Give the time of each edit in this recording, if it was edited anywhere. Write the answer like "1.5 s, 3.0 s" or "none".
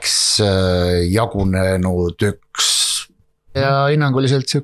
3.6 s